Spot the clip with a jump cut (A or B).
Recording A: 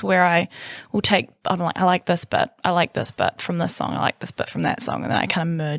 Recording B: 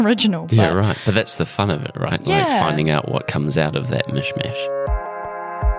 B